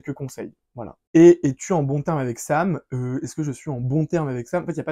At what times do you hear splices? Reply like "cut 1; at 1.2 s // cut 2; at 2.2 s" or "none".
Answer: cut 1; at 1.0 s